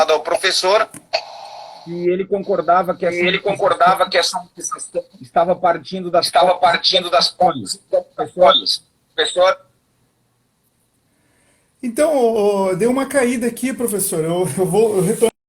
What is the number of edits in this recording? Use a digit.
1